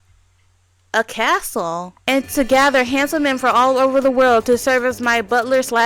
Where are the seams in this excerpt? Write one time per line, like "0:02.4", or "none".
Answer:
0:01.9